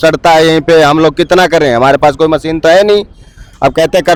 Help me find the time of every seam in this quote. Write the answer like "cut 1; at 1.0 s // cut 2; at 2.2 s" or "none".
none